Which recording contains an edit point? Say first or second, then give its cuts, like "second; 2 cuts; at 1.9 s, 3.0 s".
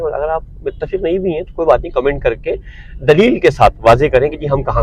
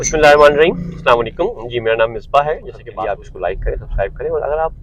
second; 1 cut; at 2.8 s